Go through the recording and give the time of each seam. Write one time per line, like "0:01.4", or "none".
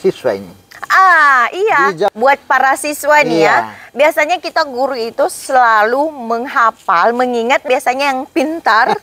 0:02.1
0:07.7